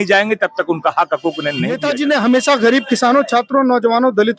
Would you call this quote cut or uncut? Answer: cut